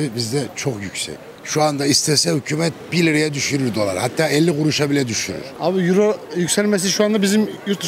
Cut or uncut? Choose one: cut